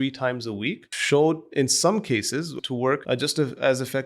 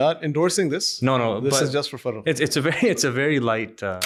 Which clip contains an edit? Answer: first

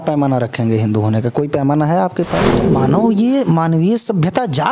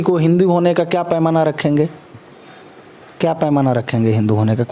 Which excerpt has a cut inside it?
first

